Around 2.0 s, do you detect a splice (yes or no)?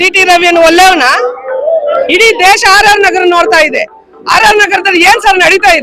yes